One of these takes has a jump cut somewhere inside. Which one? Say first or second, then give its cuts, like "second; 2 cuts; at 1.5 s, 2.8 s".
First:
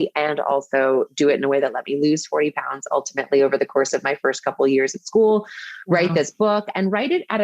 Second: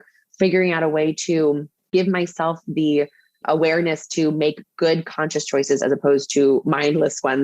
second; 1 cut; at 1.9 s